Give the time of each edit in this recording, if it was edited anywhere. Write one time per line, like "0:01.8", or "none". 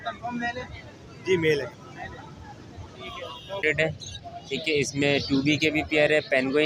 0:03.5